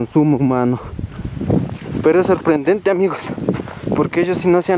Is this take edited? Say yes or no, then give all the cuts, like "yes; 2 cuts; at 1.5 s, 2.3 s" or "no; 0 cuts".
no; 0 cuts